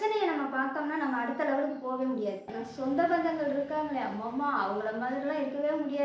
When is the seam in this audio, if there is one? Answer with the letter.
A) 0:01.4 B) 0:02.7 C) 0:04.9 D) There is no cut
B